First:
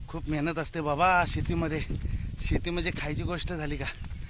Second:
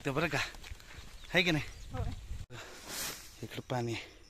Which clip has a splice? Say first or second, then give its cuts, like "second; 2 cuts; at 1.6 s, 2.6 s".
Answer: second; 1 cut; at 2.4 s